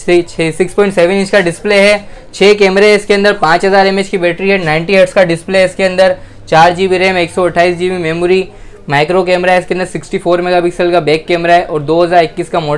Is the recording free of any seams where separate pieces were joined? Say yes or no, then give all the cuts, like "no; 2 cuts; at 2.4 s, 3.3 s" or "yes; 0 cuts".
yes; 0 cuts